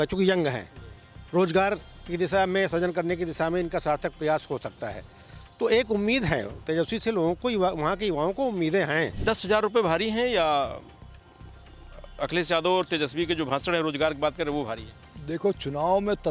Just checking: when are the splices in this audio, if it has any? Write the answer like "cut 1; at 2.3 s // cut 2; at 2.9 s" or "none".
cut 1; at 9.2 s